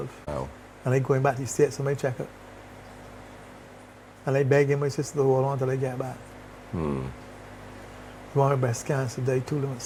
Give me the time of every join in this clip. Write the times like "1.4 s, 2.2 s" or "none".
none